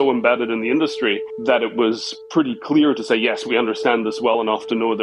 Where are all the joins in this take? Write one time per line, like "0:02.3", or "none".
none